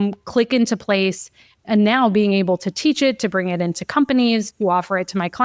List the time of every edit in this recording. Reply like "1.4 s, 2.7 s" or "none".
1.6 s